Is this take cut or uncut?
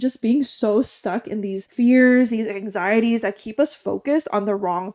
uncut